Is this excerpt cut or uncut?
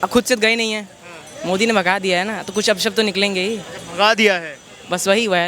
uncut